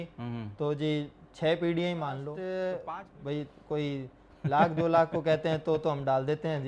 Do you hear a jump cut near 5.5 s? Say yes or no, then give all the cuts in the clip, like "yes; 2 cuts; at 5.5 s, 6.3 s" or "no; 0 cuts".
no; 1 cut; at 2.8 s